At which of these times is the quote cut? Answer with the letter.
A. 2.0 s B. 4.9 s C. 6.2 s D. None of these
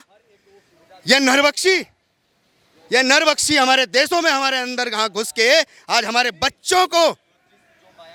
D